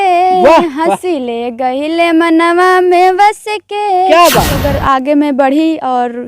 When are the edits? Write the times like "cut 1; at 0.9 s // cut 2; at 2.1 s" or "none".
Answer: cut 1; at 4.5 s